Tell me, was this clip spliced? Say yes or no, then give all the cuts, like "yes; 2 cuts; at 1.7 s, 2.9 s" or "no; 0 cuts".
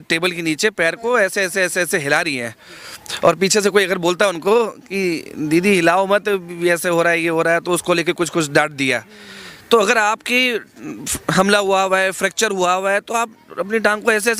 no; 0 cuts